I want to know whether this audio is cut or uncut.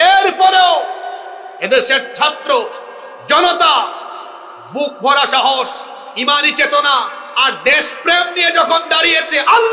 uncut